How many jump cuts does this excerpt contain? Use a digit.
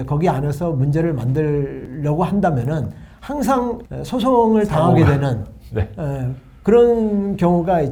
0